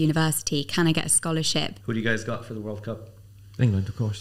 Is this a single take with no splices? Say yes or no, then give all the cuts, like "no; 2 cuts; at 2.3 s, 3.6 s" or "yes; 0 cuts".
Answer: no; 1 cut; at 1.8 s